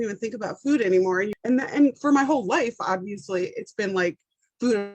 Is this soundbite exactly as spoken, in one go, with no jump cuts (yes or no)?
no